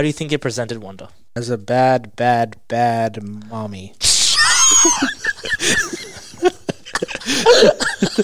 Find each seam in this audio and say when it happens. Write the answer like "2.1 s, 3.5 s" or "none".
1.3 s